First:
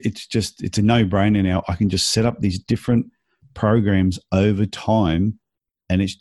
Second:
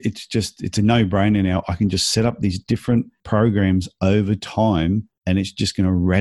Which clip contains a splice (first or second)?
second